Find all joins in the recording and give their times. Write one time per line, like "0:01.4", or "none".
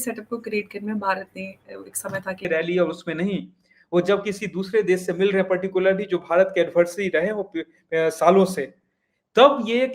0:02.5